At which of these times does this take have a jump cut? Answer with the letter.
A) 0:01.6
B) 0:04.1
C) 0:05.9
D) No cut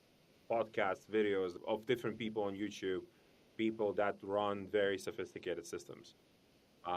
A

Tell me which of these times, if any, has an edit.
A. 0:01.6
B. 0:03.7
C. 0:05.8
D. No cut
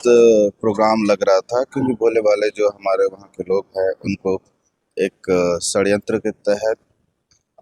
D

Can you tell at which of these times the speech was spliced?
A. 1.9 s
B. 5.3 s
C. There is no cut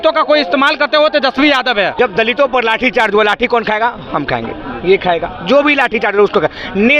A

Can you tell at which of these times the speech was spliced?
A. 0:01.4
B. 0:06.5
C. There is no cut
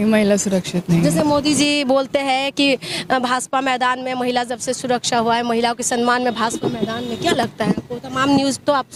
C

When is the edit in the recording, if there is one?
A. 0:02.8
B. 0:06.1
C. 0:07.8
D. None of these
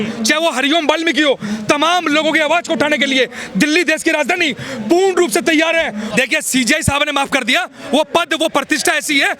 B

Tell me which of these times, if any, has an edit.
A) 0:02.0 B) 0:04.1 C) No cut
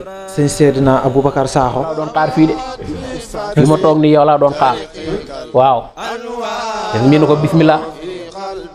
A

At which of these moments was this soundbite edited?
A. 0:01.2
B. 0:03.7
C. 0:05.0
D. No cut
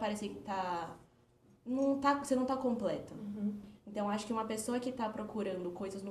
B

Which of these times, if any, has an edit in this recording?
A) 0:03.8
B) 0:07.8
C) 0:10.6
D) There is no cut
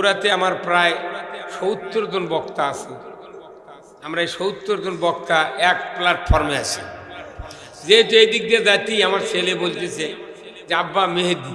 D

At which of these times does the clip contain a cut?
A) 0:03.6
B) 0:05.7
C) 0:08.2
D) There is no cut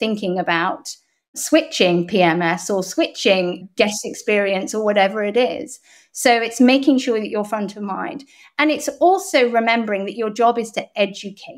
A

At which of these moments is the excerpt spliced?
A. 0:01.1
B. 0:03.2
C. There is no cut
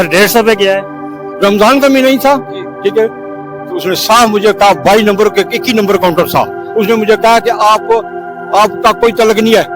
A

